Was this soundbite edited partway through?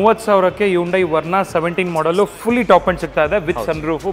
no; 0 cuts

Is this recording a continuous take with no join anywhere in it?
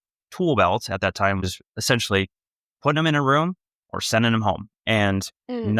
no; 1 cut; at 1.6 s

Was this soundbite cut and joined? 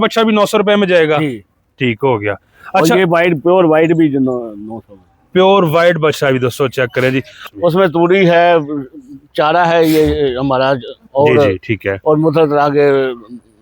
yes; 1 cut; at 7.4 s

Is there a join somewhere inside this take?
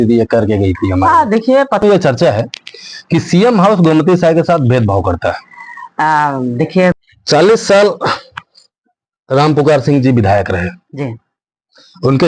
yes; 2 cuts; at 1.8 s, 7.0 s

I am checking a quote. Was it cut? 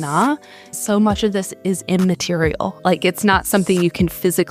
yes; 2 cuts; at 0.7 s, 2.8 s

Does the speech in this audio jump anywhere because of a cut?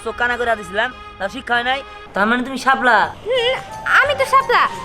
yes; 1 cut; at 2.0 s

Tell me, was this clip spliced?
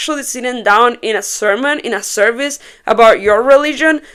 no; 0 cuts

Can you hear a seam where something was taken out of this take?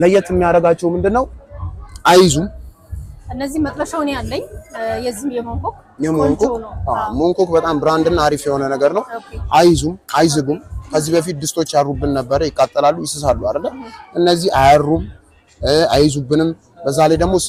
no; 0 cuts

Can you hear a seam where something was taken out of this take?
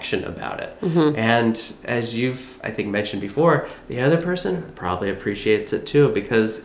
no; 0 cuts

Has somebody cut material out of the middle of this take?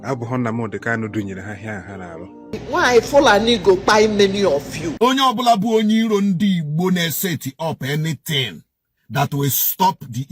yes; 2 cuts; at 2.5 s, 4.8 s

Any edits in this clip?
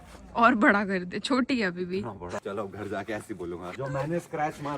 yes; 2 cuts; at 2.4 s, 3.8 s

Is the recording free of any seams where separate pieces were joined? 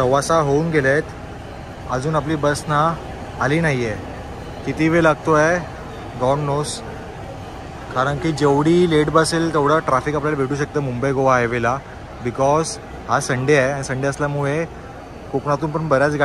yes; 0 cuts

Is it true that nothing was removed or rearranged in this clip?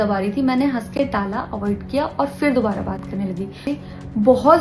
no; 1 cut; at 3.6 s

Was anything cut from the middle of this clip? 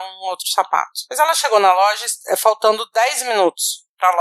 yes; 1 cut; at 1.0 s

